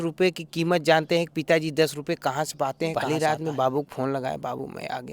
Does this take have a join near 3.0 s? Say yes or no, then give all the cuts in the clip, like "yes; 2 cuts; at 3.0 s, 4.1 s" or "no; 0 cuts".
yes; 1 cut; at 3.0 s